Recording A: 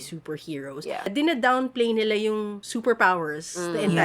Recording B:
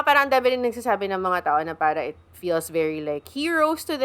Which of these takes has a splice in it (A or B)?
A